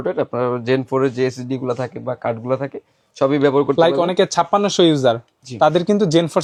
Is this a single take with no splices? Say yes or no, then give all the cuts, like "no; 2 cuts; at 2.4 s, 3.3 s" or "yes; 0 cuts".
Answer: yes; 0 cuts